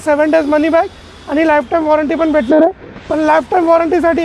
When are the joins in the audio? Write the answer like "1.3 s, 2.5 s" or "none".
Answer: none